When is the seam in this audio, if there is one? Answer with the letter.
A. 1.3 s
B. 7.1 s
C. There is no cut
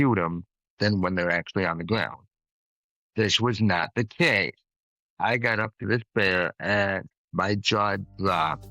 B